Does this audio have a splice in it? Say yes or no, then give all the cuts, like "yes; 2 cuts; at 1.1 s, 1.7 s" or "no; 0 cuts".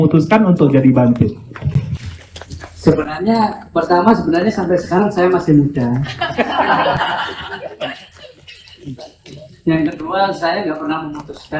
no; 0 cuts